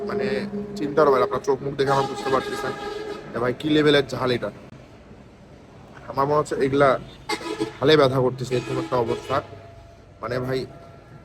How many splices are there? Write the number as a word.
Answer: zero